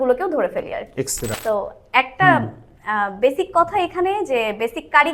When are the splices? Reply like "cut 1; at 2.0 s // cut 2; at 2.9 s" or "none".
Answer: cut 1; at 1.3 s